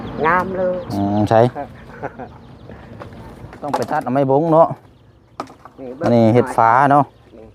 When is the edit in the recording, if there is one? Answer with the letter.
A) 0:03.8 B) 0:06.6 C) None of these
A